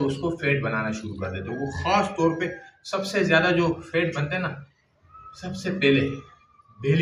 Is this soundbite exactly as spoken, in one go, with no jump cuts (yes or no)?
yes